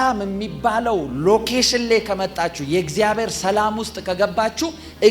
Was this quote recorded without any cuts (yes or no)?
yes